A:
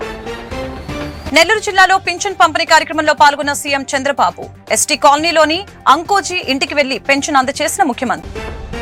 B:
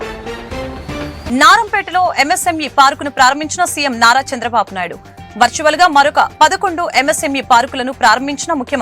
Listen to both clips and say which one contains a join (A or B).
B